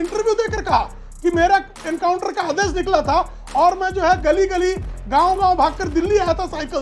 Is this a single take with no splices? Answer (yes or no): yes